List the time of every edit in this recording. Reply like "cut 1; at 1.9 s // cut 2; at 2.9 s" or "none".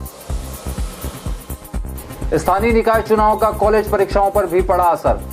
cut 1; at 1.8 s